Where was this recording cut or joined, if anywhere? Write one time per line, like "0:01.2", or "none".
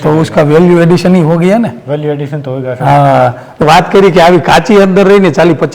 0:03.6

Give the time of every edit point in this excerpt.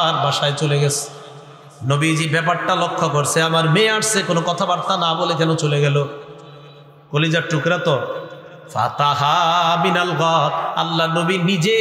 none

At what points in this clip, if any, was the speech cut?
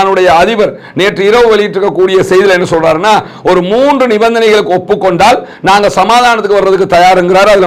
none

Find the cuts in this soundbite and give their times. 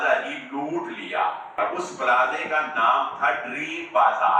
0:01.6

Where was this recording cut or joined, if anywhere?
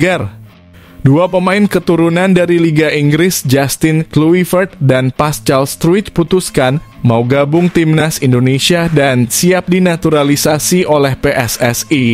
none

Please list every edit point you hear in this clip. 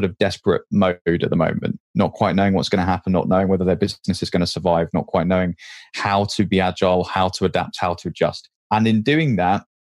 none

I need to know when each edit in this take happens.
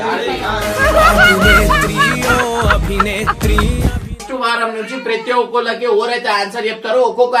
0:04.2

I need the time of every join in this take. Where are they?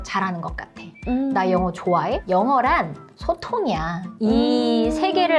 none

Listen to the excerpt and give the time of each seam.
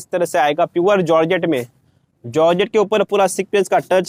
none

